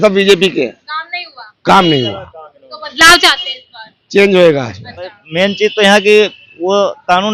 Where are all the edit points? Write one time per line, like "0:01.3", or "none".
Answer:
0:05.2